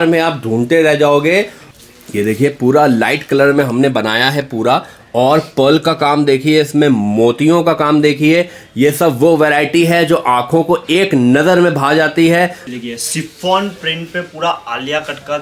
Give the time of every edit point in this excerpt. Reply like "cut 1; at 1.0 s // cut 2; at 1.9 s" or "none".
cut 1; at 1.6 s // cut 2; at 12.7 s